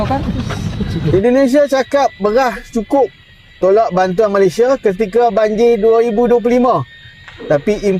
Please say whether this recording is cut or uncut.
cut